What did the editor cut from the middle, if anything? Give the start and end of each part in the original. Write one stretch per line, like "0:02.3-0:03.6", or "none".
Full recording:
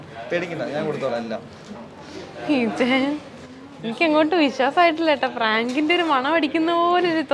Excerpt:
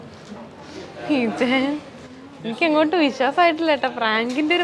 none